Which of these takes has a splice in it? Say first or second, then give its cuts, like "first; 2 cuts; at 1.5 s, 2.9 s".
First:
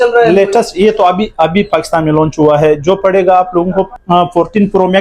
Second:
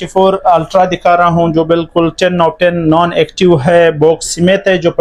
first; 1 cut; at 4.0 s